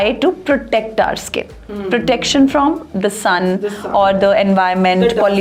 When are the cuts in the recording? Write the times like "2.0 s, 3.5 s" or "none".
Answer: none